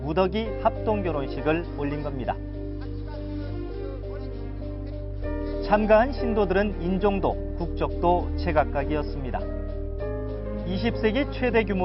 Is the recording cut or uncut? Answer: uncut